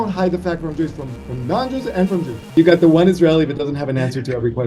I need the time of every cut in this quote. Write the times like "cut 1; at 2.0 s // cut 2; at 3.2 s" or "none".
cut 1; at 2.5 s